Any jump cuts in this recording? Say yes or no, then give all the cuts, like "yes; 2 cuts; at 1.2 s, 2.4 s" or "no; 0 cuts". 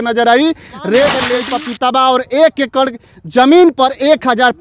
yes; 1 cut; at 1.4 s